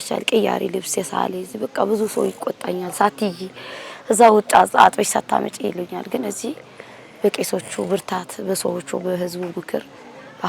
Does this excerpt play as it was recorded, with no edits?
yes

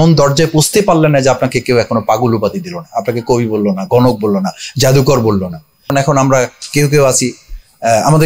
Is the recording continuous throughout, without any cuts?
no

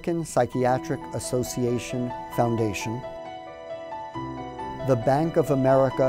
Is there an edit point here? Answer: yes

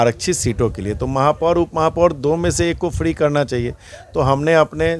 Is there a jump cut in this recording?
no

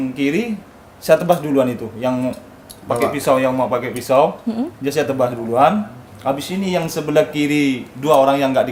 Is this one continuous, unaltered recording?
yes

